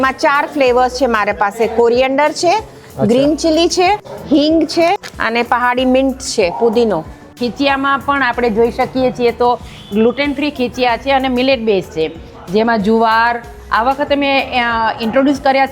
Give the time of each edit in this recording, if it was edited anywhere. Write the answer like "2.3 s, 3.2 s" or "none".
4.1 s, 5.1 s, 7.3 s